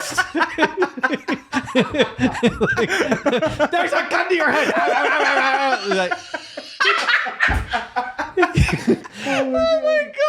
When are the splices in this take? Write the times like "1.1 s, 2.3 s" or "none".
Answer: 9.1 s